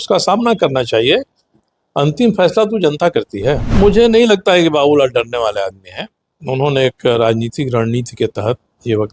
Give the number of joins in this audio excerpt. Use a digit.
1